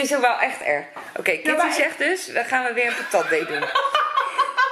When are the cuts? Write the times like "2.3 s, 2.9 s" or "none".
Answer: none